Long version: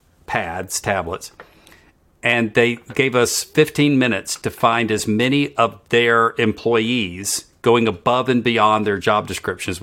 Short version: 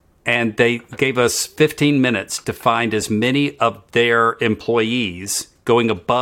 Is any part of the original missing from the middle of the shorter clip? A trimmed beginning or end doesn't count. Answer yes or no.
no